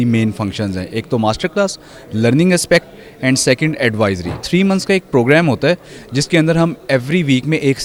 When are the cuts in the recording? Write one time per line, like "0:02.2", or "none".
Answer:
none

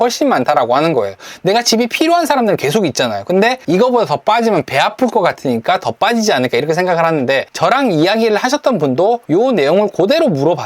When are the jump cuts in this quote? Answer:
0:03.6
0:07.5
0:09.2

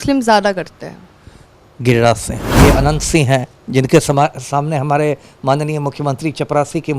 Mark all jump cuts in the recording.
0:02.4

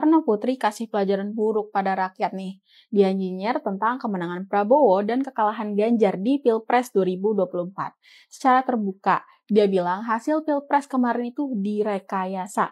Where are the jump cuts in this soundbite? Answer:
none

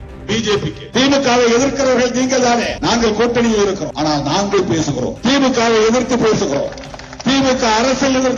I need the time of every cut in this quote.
0:00.8
0:02.7
0:03.9
0:05.1

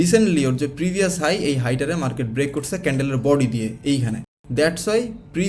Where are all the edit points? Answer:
none

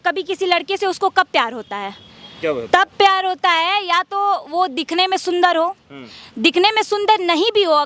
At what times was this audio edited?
none

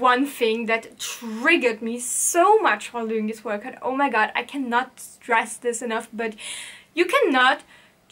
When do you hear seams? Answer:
none

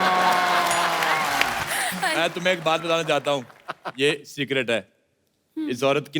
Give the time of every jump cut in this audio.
0:01.6

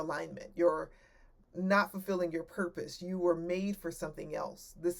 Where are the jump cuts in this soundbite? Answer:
none

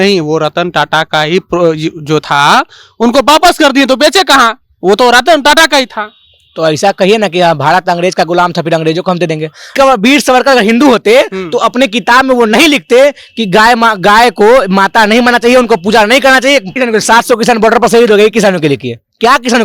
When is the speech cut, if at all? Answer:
0:09.7
0:16.7

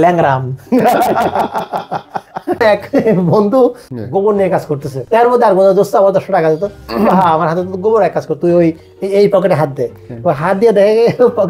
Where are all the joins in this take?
0:02.6
0:03.9
0:05.0

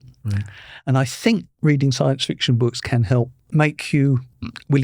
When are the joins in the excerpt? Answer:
0:03.5

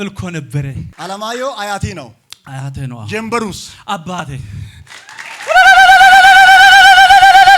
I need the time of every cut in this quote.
0:00.9

